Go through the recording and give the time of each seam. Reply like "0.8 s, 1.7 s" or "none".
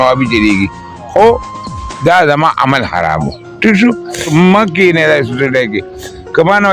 4.3 s